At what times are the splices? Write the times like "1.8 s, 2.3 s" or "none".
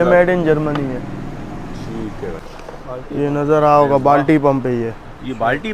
2.4 s